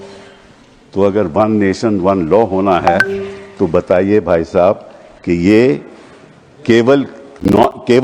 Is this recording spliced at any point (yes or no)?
no